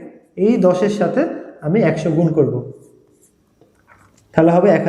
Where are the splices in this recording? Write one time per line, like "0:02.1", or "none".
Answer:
none